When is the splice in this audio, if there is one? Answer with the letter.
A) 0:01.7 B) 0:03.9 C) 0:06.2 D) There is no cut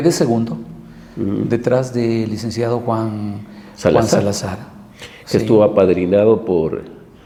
D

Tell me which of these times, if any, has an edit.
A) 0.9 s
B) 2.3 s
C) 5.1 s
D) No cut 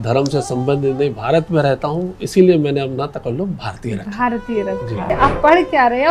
C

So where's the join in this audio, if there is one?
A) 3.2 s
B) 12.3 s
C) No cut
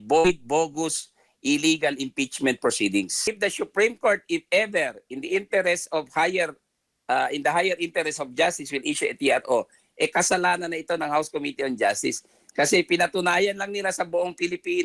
A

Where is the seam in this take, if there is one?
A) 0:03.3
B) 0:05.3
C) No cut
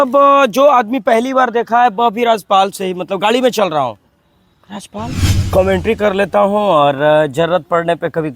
B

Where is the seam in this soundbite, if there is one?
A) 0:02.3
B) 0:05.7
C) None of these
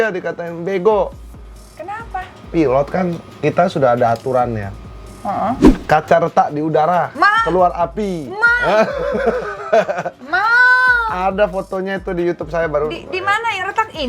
B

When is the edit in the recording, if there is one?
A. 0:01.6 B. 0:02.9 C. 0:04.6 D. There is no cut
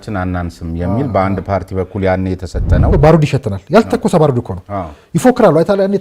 B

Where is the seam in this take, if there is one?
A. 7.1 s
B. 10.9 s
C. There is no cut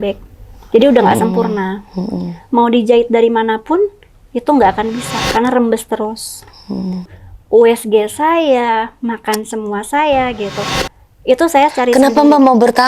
A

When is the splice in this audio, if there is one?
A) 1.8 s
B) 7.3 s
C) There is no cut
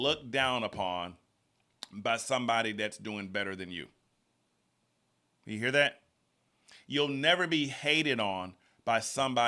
C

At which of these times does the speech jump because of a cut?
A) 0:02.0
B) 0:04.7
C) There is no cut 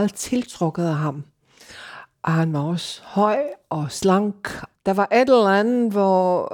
B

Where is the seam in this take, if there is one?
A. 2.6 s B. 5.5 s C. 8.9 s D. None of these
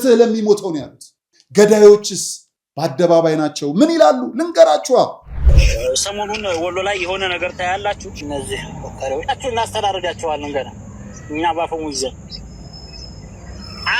B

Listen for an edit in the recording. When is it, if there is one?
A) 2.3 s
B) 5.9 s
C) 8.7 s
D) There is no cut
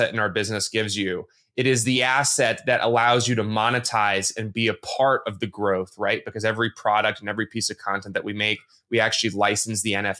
D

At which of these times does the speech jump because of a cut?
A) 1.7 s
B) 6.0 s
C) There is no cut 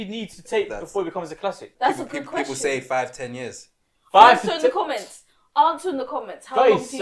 A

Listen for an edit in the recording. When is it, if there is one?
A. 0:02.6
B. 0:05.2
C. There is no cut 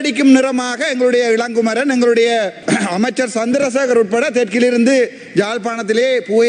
A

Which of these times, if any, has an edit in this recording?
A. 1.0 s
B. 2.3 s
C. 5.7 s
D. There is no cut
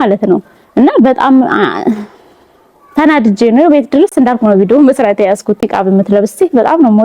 C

